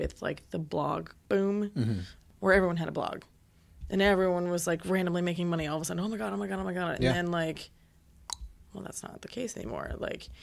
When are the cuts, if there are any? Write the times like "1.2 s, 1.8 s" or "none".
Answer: 1.1 s